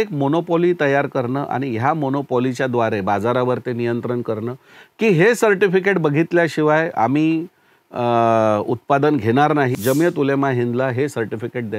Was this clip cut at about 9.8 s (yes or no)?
yes